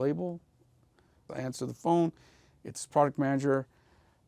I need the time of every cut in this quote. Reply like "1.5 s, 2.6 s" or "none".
1.3 s